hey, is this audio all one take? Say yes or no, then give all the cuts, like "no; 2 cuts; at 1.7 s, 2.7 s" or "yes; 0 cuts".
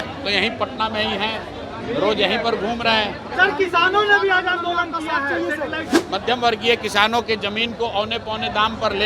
no; 1 cut; at 6.0 s